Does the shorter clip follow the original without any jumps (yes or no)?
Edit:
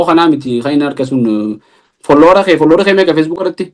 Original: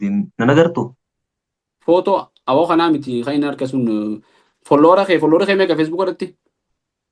yes